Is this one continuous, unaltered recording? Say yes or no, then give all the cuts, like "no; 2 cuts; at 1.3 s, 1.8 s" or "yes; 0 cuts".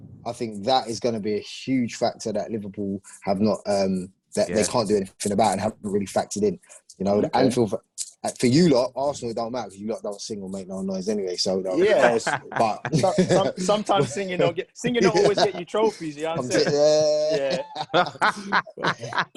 yes; 0 cuts